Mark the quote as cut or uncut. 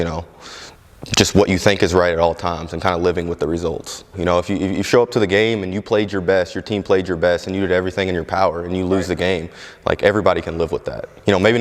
cut